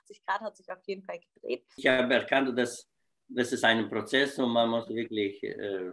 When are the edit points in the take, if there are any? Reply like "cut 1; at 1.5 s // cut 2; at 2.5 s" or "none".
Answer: cut 1; at 1.7 s

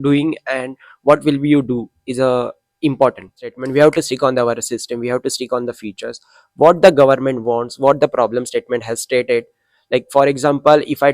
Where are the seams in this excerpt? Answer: cut 1; at 3.6 s

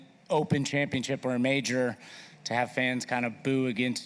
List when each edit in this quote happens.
none

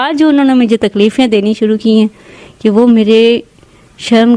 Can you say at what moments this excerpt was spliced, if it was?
none

